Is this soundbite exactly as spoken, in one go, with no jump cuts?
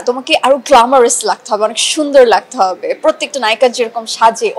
yes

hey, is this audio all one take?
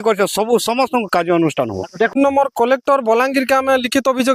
no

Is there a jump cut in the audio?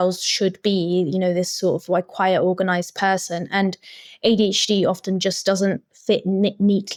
no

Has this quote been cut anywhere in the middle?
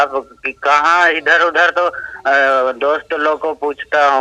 no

